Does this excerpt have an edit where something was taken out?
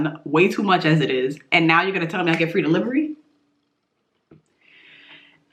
no; 0 cuts

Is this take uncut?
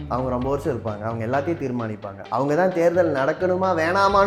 yes; 0 cuts

